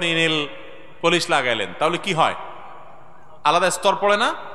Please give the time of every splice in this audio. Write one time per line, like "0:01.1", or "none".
none

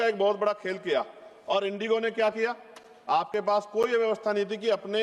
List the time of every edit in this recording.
none

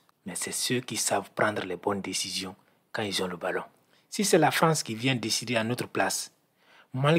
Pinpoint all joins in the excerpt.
0:03.8

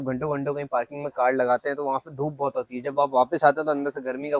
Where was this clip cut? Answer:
none

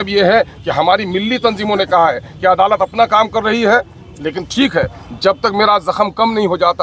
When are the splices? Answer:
none

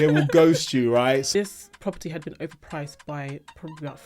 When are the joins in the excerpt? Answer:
0:01.3

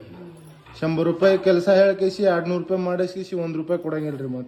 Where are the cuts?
none

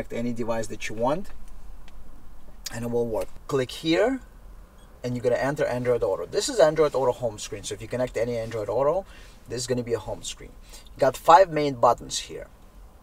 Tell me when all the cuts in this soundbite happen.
0:03.3

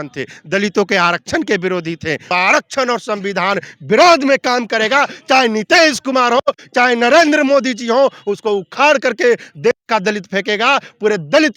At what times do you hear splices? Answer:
0:02.3

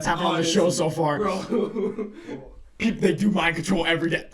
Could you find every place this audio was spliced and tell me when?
none

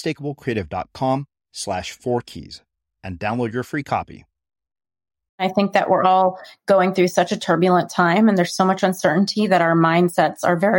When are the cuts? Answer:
0:05.4

